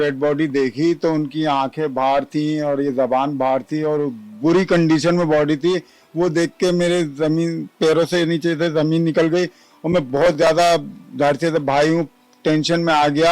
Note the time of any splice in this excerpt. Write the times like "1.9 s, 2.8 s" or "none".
none